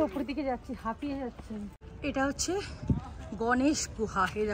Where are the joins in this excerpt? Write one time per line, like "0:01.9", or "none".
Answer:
0:01.8